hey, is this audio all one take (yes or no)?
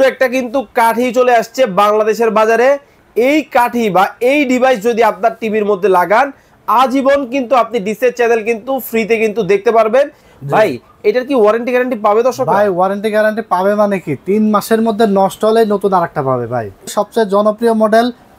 no